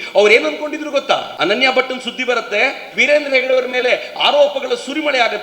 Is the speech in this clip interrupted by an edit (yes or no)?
yes